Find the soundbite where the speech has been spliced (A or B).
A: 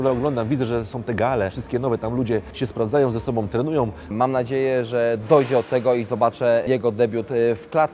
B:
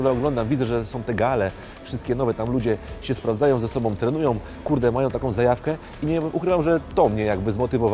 A